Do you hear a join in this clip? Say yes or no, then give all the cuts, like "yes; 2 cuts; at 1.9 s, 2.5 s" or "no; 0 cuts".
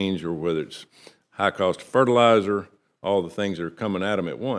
no; 0 cuts